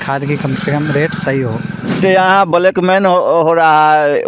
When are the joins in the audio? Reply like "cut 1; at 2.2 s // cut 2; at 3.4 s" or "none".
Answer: cut 1; at 2.0 s